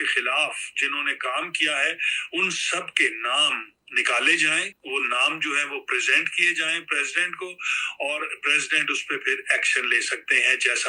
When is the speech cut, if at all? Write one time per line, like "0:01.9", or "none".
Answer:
none